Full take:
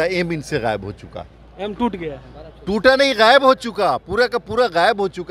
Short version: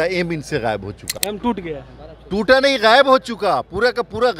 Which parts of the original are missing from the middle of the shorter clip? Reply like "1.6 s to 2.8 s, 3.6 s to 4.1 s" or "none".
1.1 s to 1.4 s